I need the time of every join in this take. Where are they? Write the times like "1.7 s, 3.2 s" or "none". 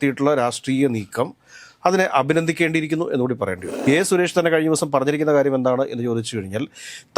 3.7 s